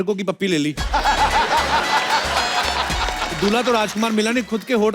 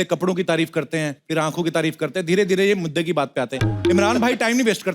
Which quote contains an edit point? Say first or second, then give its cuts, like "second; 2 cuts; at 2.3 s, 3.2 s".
second; 1 cut; at 1.2 s